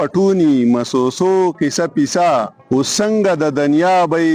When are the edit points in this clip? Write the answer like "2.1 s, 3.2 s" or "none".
2.6 s